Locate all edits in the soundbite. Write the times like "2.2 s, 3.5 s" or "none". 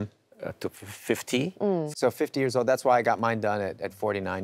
1.9 s